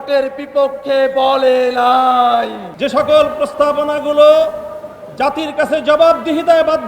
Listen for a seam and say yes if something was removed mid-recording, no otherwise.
yes